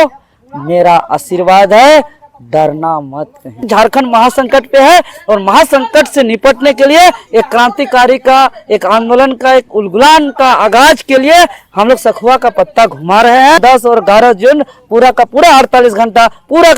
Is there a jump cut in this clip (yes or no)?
yes